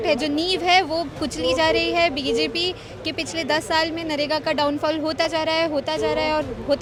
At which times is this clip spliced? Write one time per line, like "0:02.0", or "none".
none